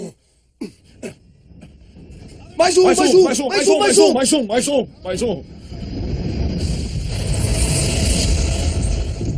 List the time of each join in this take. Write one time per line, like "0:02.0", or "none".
0:07.7